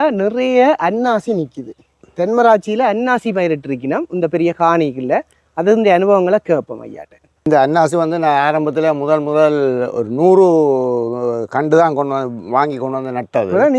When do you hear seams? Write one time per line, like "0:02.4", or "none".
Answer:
none